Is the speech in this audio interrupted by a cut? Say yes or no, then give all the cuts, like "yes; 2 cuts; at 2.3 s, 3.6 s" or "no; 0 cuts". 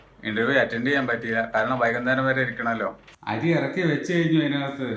yes; 1 cut; at 3.1 s